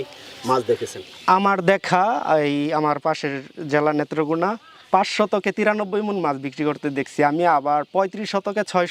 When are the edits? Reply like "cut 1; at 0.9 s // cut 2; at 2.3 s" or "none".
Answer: none